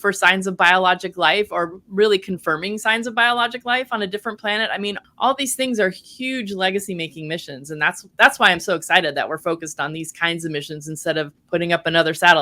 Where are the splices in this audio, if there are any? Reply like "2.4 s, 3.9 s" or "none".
5.1 s, 11.4 s